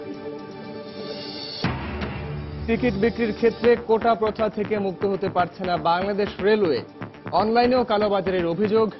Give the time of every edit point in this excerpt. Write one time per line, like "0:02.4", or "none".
none